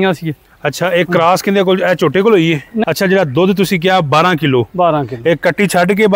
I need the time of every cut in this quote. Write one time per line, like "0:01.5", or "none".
0:02.7